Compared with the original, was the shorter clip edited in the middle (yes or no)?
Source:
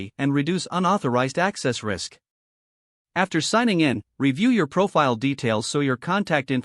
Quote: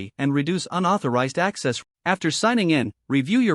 yes